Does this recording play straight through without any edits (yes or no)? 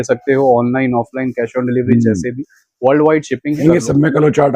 no